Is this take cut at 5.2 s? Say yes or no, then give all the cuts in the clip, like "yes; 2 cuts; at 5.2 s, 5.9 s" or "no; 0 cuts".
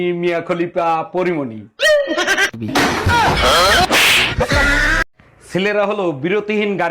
yes; 1 cut; at 5.2 s